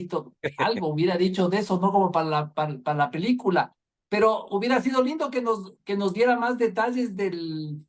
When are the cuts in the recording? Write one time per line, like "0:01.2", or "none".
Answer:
none